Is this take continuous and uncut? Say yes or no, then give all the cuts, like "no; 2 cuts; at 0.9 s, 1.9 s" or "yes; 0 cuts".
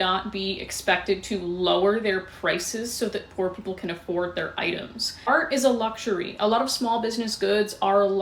yes; 0 cuts